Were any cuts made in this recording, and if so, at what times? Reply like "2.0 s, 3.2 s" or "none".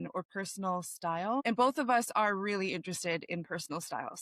1.4 s